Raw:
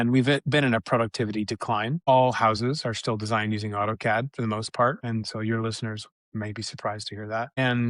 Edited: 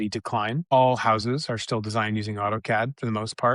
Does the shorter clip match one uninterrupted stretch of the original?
yes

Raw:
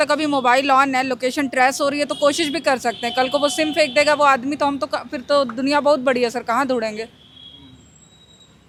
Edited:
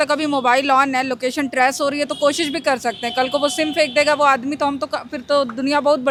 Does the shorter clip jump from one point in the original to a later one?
no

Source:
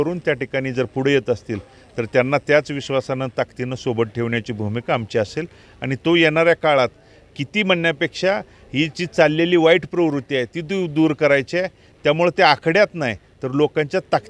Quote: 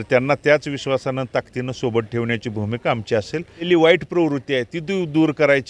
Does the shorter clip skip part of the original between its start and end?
yes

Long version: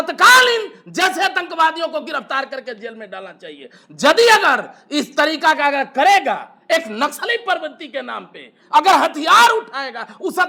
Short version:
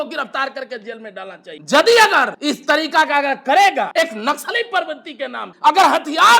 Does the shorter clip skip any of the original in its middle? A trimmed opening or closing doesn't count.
yes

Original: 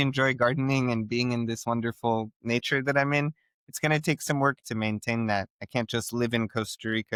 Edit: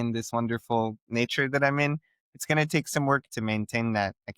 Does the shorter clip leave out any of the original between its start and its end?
no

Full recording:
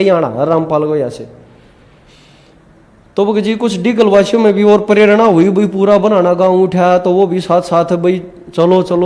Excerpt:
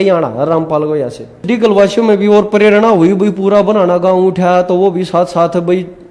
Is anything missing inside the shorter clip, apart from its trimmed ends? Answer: yes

